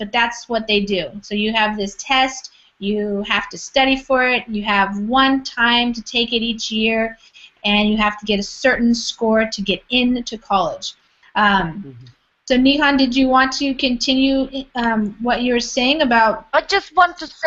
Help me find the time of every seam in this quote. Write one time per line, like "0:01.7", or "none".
none